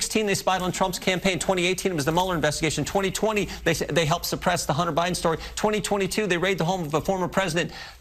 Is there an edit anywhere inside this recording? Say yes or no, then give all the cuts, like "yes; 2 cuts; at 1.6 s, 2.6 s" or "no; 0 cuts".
no; 0 cuts